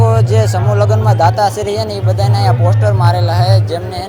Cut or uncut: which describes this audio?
uncut